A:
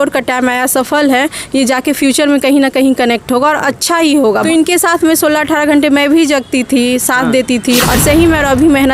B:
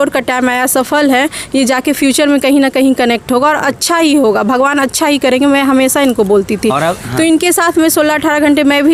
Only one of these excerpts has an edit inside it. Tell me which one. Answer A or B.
A